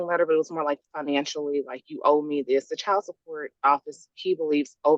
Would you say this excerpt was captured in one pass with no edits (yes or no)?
yes